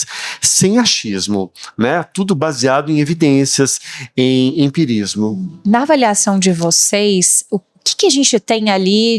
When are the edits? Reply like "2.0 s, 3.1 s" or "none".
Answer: none